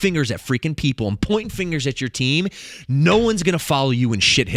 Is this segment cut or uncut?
uncut